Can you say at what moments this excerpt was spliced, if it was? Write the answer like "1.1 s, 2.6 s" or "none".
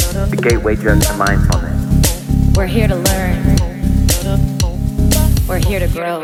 none

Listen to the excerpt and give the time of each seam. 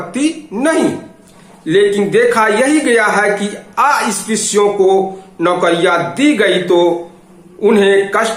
none

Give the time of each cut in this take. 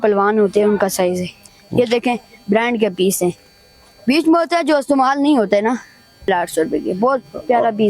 1.5 s, 6.3 s

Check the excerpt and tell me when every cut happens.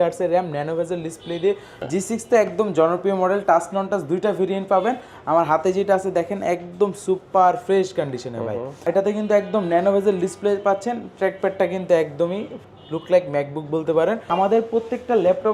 1.7 s, 8.8 s, 14.3 s

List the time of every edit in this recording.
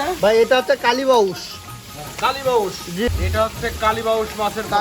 3.1 s

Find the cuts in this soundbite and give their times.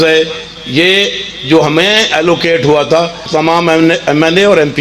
3.2 s

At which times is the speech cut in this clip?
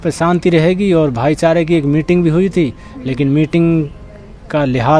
none

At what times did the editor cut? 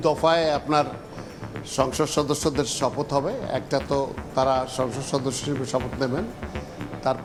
none

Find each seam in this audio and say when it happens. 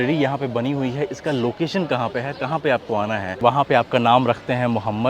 3.3 s

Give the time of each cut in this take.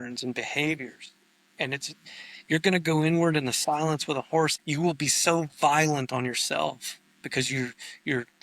4.6 s

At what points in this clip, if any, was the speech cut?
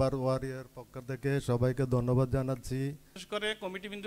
3.1 s

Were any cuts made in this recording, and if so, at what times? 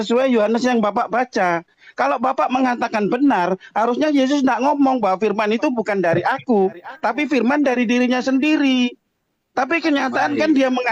none

